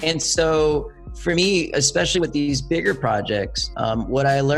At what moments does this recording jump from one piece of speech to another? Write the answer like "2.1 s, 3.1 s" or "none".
none